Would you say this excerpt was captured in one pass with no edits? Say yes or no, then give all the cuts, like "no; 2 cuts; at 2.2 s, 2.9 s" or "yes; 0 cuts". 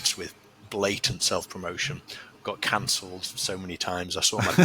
yes; 0 cuts